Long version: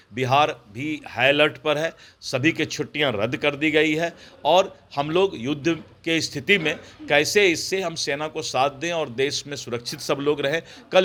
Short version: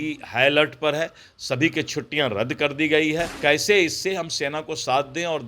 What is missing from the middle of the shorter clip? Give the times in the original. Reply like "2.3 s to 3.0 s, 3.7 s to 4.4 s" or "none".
4.2 s to 7.0 s

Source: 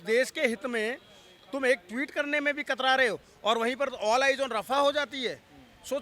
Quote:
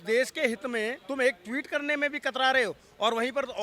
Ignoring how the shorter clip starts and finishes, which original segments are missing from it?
1.0 s to 1.5 s

